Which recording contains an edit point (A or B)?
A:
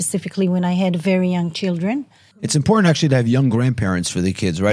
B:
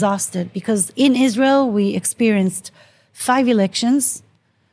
A